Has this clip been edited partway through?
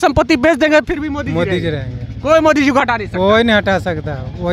no; 0 cuts

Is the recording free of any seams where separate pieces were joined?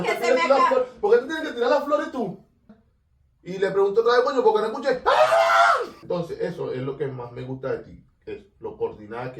no; 2 cuts; at 2.7 s, 6.0 s

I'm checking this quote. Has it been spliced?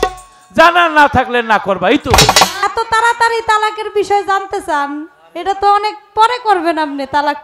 yes; 1 cut; at 2.6 s

